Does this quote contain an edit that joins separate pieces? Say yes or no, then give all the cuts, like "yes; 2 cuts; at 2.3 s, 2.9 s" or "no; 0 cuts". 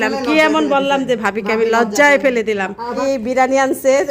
yes; 1 cut; at 3.0 s